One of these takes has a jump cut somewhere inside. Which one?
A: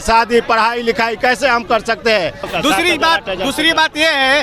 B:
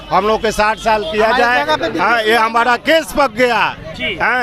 A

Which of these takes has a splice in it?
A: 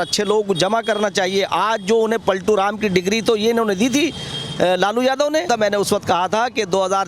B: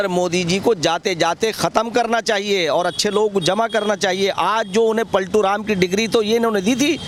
A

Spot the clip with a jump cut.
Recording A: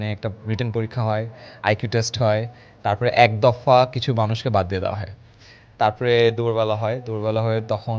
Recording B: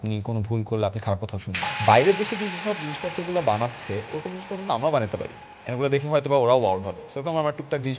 B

